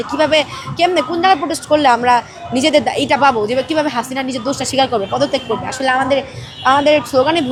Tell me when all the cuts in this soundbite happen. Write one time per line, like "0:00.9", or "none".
none